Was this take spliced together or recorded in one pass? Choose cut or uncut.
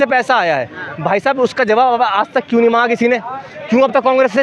uncut